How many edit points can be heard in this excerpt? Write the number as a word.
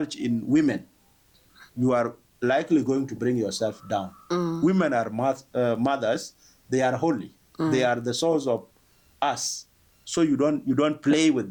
zero